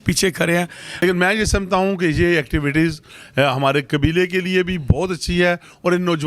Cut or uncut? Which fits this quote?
cut